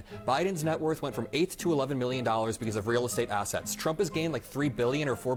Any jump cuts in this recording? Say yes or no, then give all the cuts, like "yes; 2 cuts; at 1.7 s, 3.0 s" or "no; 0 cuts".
no; 0 cuts